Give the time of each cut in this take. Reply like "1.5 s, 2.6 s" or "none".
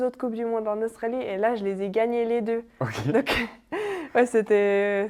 none